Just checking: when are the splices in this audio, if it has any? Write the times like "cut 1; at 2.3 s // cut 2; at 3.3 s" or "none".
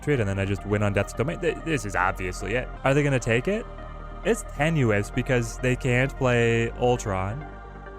cut 1; at 2.7 s